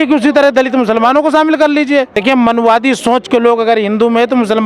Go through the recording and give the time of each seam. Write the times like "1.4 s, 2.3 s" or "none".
2.2 s